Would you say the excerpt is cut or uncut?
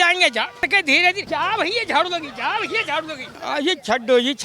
cut